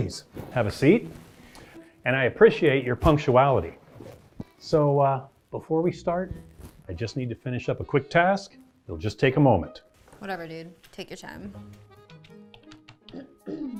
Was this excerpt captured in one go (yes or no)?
yes